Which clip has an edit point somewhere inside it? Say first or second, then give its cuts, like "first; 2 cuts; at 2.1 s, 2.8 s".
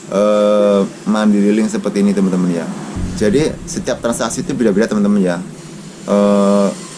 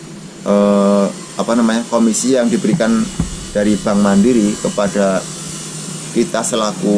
first; 1 cut; at 2.9 s